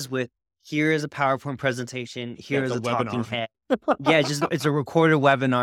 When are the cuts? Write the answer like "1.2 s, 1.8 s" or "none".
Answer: none